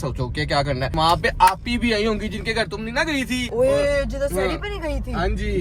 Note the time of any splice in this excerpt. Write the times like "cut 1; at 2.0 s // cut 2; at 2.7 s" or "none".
cut 1; at 0.9 s